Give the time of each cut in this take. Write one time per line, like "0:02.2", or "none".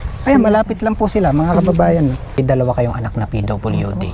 0:02.4